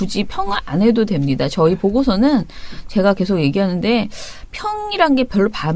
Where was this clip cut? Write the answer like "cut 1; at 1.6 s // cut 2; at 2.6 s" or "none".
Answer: none